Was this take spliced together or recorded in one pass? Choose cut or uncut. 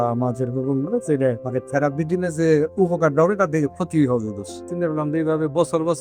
cut